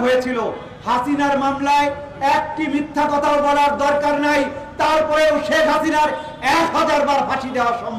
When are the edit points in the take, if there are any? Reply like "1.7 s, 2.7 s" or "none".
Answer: none